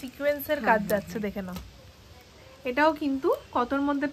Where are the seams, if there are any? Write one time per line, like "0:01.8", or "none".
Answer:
none